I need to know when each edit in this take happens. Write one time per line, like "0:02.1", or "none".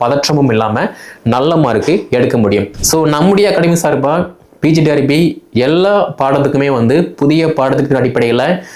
0:02.7

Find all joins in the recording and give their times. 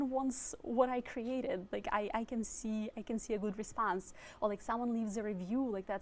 none

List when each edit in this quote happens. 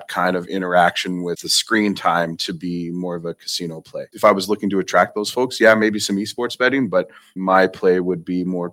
0:01.5
0:04.0
0:07.4

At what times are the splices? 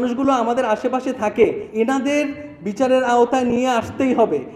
0:01.6

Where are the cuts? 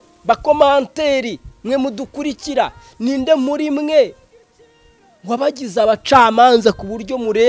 none

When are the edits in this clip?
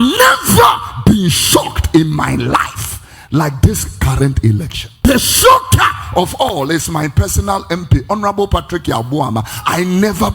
0:05.0

